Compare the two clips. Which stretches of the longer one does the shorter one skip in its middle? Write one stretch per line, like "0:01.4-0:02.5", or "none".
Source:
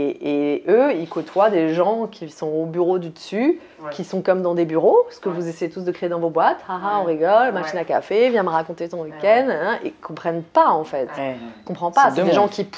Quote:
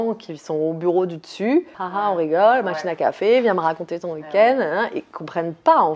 0:03.7-0:06.7